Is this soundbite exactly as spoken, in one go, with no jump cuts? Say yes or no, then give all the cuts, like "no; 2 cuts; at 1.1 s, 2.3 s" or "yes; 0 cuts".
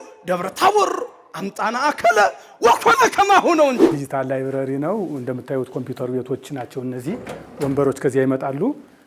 no; 1 cut; at 4.0 s